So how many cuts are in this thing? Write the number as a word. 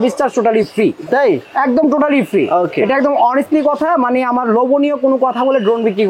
zero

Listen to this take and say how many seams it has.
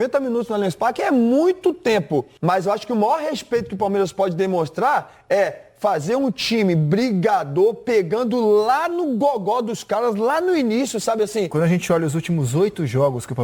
two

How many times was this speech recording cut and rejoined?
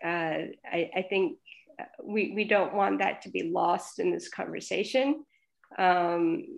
zero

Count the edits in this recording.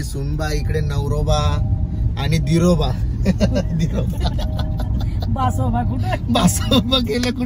zero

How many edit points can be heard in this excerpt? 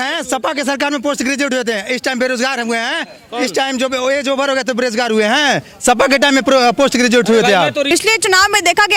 one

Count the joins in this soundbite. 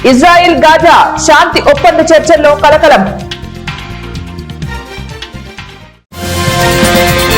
two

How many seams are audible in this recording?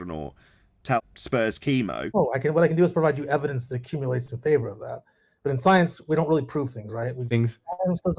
two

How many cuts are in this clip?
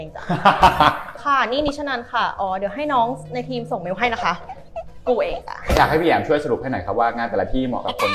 two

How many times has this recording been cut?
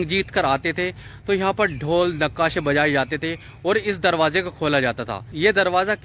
zero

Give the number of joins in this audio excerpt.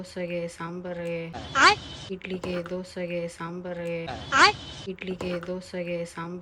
zero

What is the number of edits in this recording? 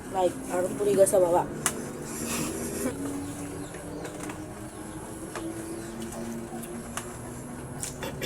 one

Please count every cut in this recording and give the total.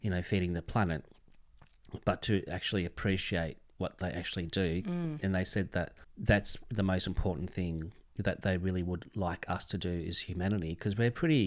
one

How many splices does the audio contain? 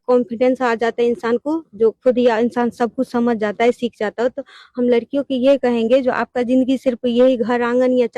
one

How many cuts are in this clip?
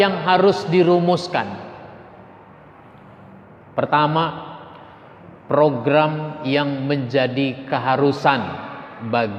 zero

